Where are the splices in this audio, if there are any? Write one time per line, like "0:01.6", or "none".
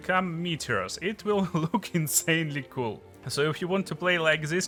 none

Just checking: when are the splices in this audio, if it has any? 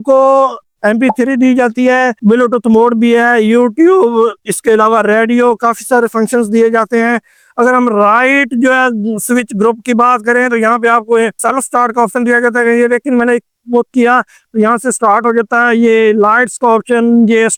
none

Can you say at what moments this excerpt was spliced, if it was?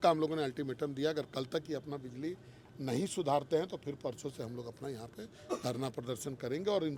none

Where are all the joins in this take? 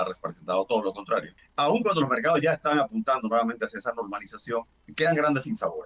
0:01.4
0:04.8

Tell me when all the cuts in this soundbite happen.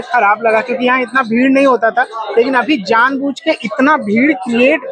none

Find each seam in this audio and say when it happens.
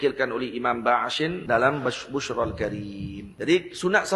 0:01.4
0:03.2

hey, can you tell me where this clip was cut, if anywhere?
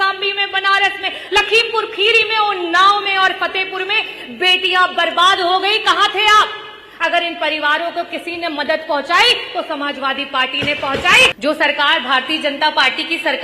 0:11.3

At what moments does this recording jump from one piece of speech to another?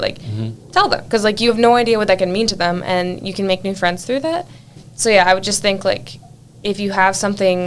0:04.8

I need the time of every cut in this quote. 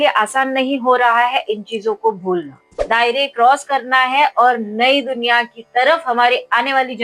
0:02.7

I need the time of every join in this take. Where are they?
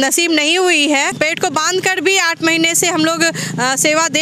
0:01.1

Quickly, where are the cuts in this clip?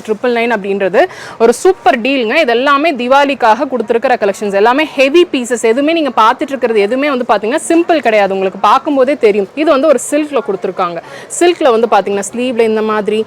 0:09.5

